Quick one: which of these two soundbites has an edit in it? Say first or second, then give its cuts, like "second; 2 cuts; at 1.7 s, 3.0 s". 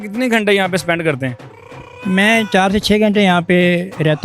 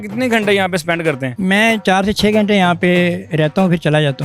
second; 1 cut; at 1.3 s